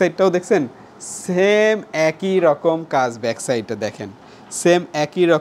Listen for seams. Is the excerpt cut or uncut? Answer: uncut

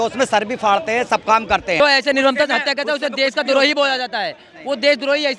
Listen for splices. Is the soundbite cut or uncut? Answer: cut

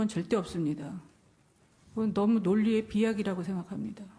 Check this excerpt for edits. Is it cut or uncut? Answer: uncut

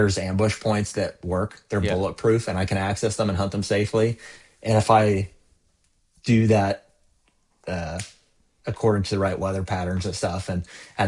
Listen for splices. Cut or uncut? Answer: uncut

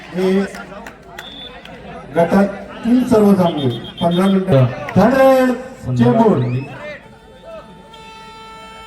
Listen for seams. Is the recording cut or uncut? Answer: cut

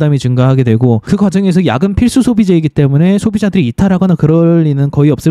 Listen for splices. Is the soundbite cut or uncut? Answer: cut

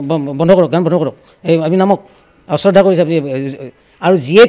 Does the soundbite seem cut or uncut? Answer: uncut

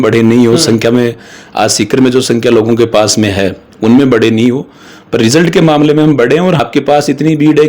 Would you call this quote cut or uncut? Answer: cut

